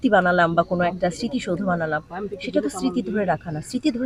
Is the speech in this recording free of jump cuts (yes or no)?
yes